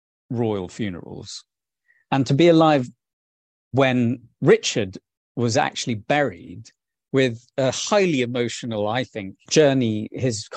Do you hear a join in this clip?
yes; 2 cuts; at 6.9 s, 9.4 s

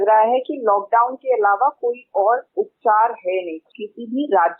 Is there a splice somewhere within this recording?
yes; 2 cuts; at 2.5 s, 3.6 s

